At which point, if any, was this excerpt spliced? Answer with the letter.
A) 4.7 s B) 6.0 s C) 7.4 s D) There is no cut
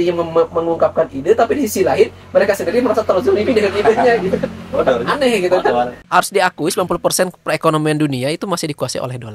B